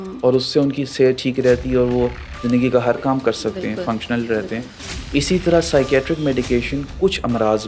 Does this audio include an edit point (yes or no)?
no